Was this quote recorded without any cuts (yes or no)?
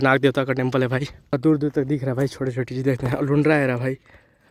no